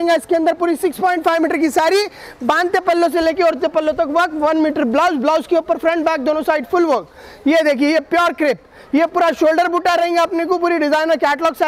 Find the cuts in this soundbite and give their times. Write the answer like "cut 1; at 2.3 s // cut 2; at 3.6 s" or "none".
none